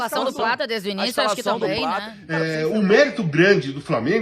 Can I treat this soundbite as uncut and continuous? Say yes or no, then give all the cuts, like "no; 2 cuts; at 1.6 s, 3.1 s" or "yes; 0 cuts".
no; 1 cut; at 2.1 s